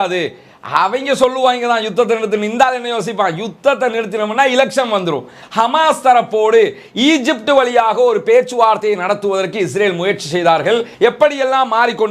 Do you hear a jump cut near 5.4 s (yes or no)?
yes